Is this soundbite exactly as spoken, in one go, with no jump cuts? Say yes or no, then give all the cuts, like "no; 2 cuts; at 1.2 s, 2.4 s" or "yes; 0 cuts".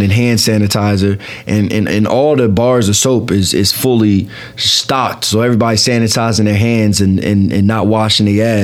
yes; 0 cuts